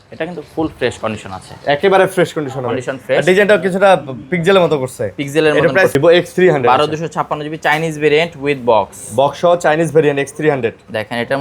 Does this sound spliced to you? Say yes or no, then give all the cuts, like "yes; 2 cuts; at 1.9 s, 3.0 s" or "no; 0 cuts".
yes; 1 cut; at 6.0 s